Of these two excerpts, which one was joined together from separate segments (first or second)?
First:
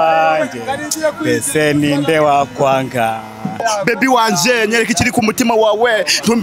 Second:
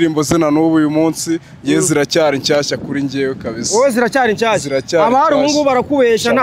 first